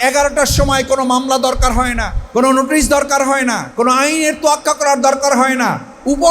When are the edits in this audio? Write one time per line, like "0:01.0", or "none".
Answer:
0:02.1